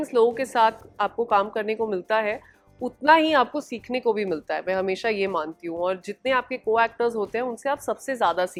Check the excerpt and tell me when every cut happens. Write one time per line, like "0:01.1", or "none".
none